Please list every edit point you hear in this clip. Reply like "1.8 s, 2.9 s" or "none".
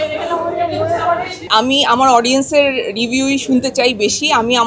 1.5 s